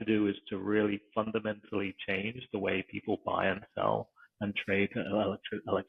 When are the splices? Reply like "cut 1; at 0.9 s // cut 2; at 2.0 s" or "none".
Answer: none